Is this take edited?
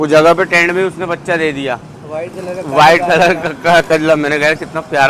no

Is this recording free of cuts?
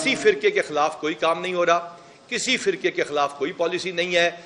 yes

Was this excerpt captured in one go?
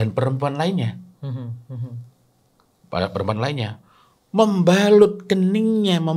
yes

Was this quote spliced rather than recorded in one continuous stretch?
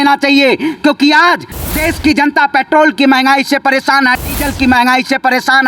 no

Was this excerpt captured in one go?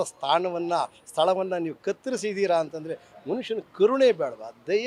yes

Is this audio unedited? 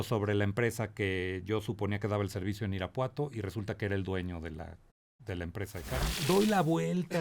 no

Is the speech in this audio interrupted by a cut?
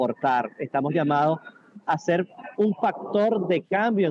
no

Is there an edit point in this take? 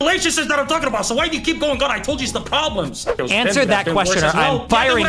yes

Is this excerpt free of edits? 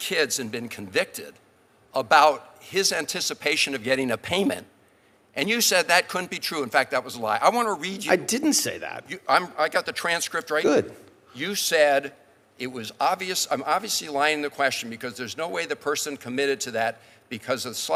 yes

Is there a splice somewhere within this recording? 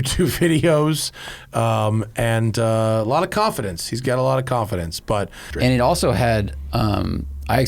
yes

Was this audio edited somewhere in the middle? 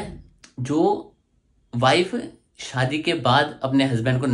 no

